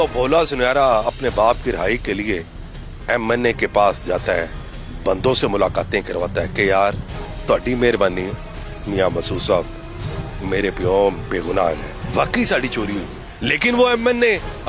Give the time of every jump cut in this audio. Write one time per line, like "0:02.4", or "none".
none